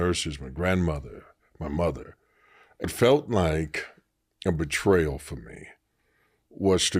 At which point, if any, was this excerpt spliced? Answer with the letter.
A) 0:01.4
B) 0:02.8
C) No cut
B